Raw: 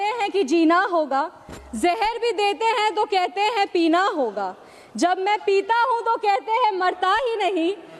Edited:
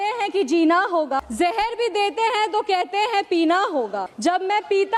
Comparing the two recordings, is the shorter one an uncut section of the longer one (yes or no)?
no